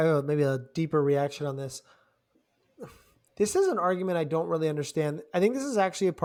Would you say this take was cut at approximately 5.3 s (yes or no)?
no